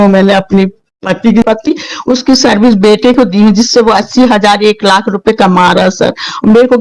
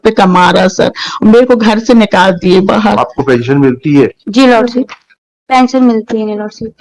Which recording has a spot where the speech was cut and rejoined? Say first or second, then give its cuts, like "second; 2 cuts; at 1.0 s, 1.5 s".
first; 1 cut; at 1.4 s